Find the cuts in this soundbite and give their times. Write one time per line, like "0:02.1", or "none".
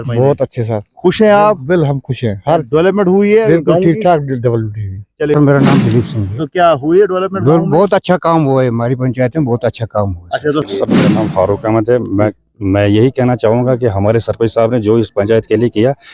0:05.4
0:10.7